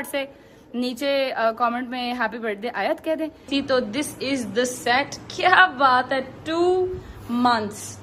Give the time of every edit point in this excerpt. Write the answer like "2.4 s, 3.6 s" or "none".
3.4 s